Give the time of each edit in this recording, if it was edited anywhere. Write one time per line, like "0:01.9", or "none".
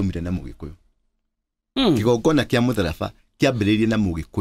0:01.6